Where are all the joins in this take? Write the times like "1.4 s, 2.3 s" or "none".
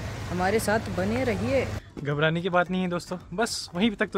1.8 s